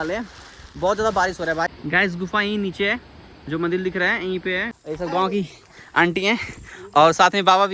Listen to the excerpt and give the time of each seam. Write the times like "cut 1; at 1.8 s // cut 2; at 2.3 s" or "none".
cut 1; at 1.7 s // cut 2; at 4.7 s